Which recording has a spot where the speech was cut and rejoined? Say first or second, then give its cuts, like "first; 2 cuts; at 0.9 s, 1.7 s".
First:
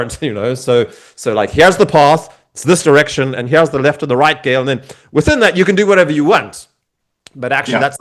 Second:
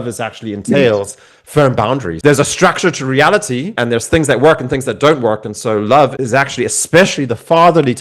second; 3 cuts; at 2.1 s, 3.8 s, 6.2 s